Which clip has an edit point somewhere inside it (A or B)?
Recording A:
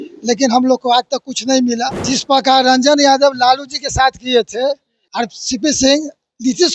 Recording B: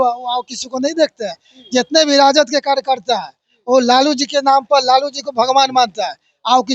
A